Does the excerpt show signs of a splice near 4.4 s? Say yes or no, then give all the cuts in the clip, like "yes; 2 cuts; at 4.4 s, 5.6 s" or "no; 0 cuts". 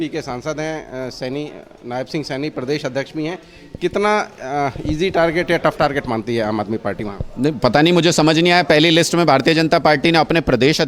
no; 0 cuts